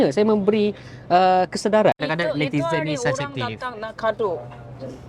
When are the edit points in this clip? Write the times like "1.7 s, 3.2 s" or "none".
2.0 s